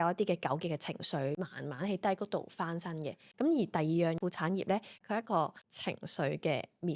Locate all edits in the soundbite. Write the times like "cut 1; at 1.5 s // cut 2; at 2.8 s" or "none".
none